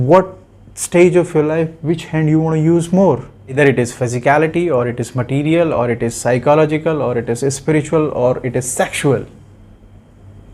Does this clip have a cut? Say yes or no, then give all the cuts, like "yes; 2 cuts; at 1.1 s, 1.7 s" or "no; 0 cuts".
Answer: yes; 1 cut; at 3.6 s